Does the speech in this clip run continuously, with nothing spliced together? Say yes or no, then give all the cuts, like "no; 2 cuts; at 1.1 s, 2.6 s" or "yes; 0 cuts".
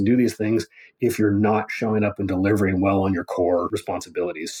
no; 1 cut; at 3.7 s